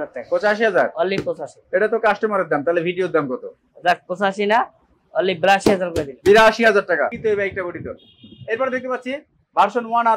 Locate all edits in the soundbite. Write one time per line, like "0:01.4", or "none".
0:07.1

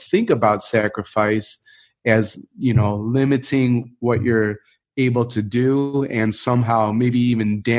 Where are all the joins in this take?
none

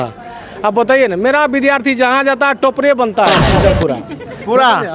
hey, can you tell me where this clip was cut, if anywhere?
0:03.6

